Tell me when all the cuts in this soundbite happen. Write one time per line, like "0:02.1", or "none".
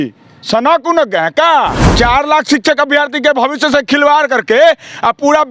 0:01.8